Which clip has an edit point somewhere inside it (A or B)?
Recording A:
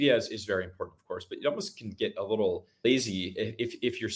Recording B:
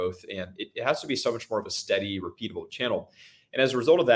A